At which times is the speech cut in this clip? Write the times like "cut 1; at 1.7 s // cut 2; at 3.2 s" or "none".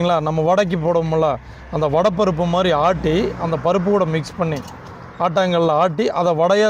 none